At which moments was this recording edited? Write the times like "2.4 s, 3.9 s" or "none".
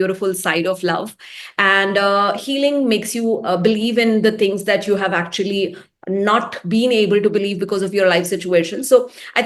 none